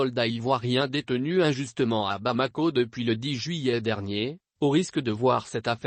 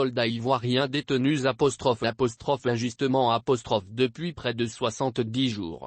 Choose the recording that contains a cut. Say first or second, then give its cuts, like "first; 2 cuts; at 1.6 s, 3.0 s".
second; 1 cut; at 1.0 s